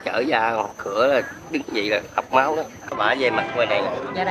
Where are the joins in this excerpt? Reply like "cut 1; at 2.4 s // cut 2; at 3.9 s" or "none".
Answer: cut 1; at 3.0 s